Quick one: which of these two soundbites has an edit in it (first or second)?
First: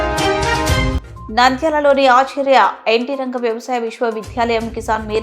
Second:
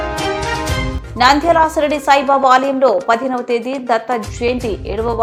first